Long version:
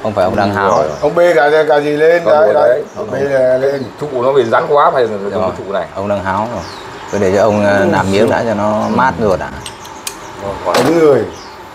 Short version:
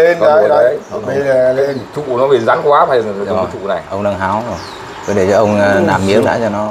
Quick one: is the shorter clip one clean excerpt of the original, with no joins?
yes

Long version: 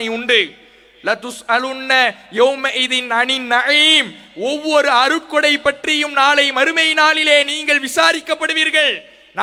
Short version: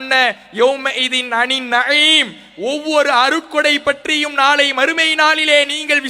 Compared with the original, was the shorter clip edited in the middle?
no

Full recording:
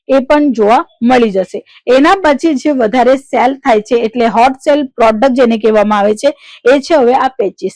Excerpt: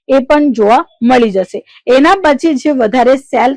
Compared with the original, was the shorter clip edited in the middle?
no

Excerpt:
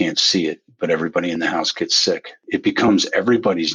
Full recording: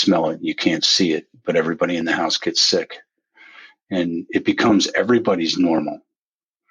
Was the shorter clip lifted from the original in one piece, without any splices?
no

